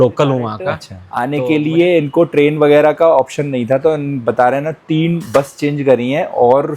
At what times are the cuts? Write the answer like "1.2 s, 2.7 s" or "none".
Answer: 1.1 s